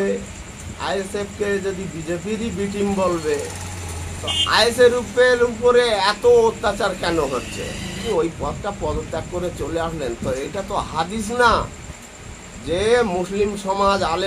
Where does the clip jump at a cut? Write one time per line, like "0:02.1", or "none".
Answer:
0:08.0